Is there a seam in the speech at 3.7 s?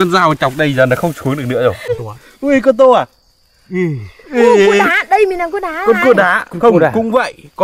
no; 1 cut; at 1.8 s

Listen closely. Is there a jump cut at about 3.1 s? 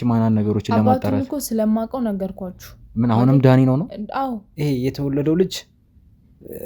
no; 1 cut; at 4.5 s

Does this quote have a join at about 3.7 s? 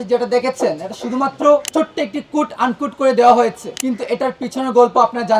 yes; 2 cuts; at 1.7 s, 3.7 s

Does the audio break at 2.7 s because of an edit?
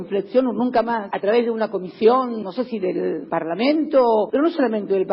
yes; 1 cut; at 2.7 s

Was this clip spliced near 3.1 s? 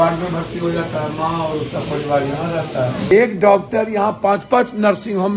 yes; 1 cut; at 3.1 s

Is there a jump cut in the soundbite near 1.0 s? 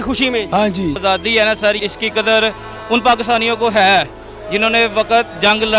yes; 2 cuts; at 1.0 s, 1.8 s

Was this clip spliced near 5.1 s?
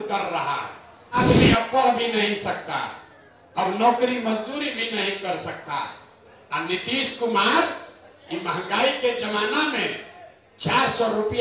no; 1 cut; at 1.2 s

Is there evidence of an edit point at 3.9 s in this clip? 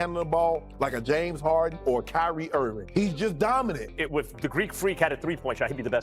yes; 1 cut; at 3.9 s

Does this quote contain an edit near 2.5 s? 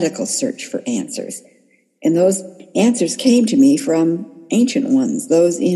no; 0 cuts

